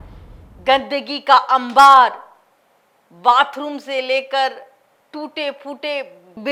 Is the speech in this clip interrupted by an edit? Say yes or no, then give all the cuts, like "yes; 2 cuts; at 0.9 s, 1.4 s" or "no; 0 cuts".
no; 0 cuts